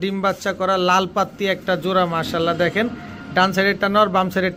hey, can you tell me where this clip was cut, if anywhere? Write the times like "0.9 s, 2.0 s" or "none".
none